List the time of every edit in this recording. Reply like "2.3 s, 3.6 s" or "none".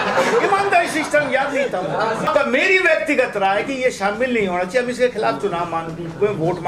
2.3 s